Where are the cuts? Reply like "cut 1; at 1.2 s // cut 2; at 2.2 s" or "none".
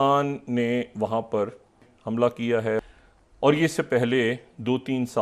cut 1; at 1.9 s // cut 2; at 2.8 s